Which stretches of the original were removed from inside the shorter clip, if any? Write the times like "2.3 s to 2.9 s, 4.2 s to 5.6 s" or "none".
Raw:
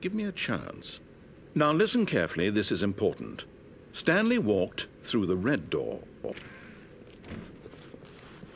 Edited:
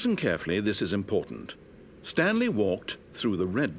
none